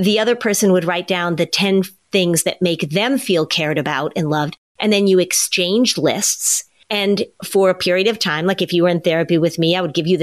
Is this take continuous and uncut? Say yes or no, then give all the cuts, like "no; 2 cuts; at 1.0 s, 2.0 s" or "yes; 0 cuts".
yes; 0 cuts